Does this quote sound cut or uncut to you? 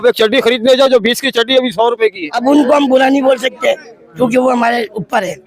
cut